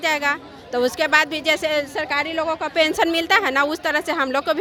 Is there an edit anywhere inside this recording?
no; 0 cuts

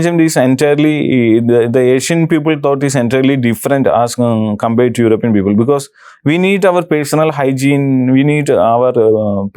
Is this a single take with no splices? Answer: yes; 0 cuts

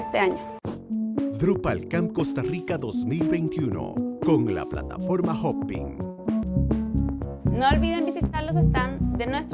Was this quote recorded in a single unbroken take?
no; 1 cut; at 6.5 s

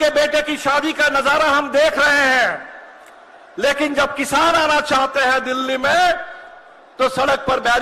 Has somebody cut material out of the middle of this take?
no; 0 cuts

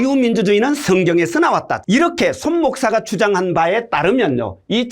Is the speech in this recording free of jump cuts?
no; 1 cut; at 1.8 s

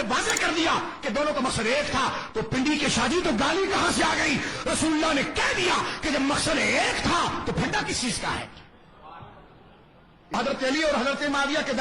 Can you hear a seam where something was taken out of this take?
yes; 1 cut; at 10.3 s

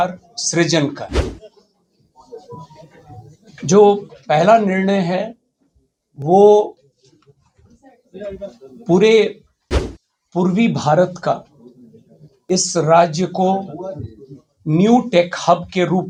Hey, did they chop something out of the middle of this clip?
no; 0 cuts

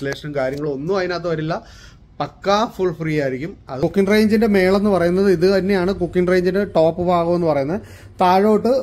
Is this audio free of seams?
no; 1 cut; at 3.8 s

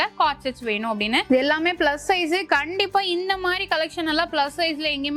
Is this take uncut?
no; 1 cut; at 1.2 s

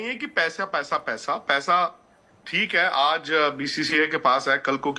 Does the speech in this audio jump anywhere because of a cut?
no; 0 cuts

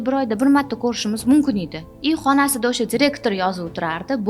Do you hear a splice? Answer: no; 0 cuts

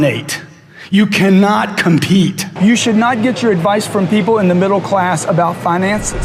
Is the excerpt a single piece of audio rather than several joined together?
no; 1 cut; at 2.5 s

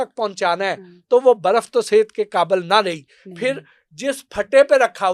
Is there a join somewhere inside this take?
no; 0 cuts

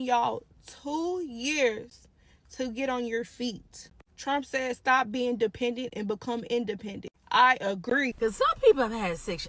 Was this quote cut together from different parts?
yes; 1 cut; at 8.1 s

